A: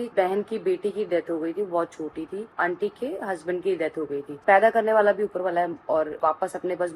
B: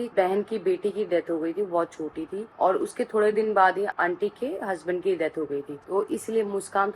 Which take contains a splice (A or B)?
A